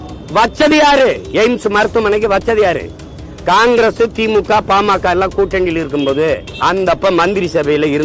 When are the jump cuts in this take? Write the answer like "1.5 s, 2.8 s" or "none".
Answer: 6.5 s